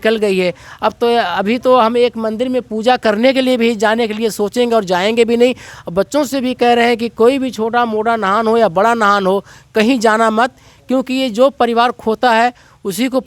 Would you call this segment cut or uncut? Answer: uncut